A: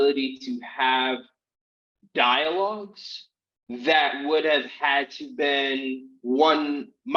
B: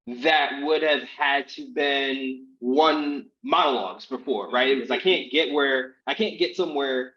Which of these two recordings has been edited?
B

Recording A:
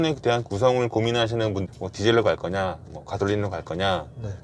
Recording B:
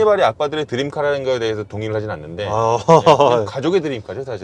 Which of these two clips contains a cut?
A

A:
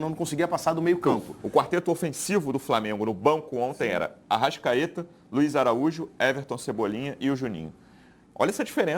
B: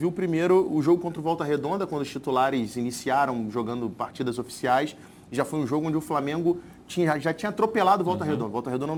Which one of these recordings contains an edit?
A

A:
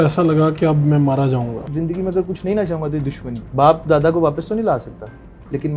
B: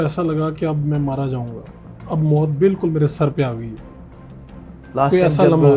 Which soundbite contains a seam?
A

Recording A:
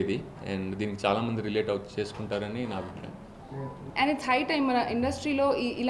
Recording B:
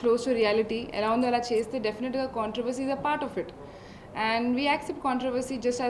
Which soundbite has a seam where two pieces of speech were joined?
A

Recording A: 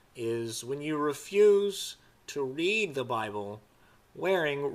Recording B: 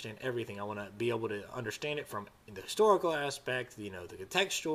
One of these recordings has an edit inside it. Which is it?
A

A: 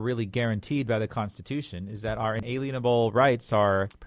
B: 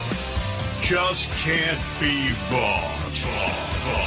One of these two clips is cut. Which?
A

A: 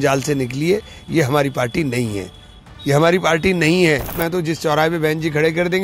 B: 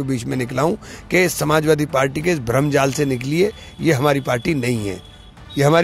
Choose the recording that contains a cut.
A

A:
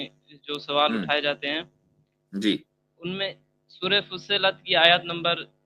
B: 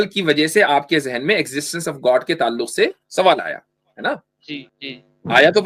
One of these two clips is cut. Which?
B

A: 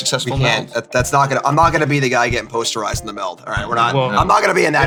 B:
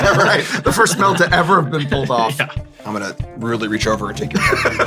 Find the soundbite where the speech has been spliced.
B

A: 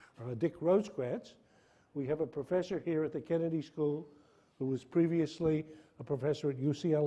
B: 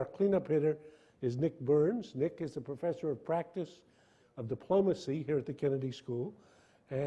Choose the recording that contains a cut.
A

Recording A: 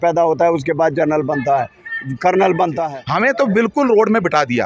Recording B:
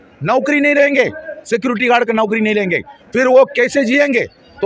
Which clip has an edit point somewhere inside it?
A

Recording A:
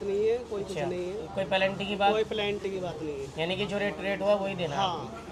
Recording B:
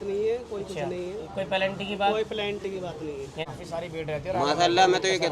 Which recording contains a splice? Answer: B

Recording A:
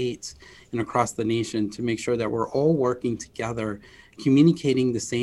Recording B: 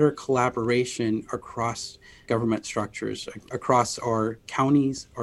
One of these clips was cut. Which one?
B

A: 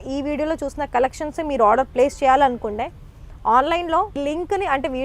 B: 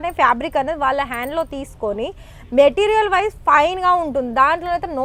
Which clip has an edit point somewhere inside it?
A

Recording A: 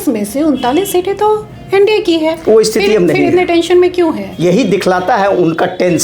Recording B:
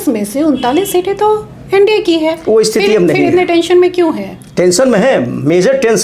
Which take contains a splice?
A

